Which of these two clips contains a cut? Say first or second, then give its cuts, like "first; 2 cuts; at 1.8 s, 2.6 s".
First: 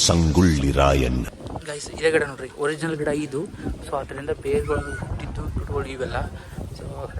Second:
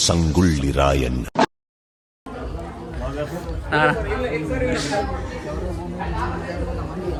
first; 1 cut; at 1.3 s